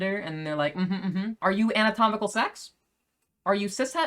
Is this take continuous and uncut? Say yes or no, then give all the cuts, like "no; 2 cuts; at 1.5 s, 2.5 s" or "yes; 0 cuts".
yes; 0 cuts